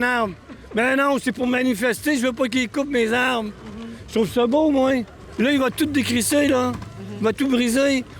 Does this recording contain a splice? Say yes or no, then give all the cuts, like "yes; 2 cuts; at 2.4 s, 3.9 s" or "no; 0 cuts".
yes; 1 cut; at 5.2 s